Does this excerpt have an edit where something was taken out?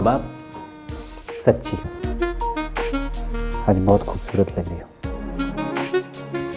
no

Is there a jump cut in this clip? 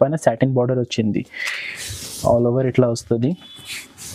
no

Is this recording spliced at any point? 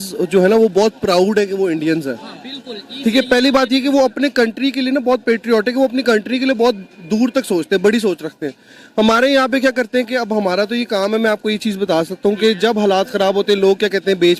no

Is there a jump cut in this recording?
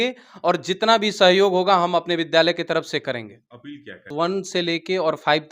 yes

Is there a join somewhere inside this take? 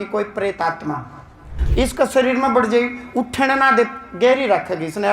yes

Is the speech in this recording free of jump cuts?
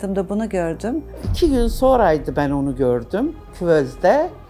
no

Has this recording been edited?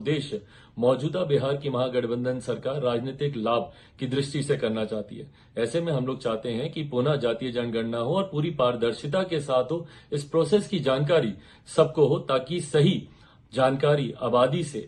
no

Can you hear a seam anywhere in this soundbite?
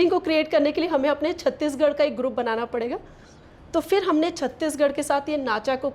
no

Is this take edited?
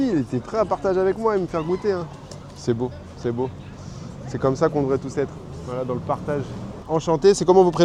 no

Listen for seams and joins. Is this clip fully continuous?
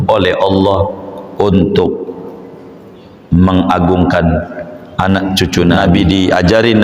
no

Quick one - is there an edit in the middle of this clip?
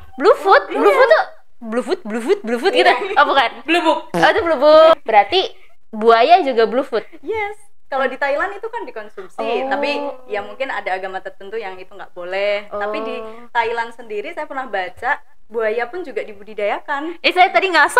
yes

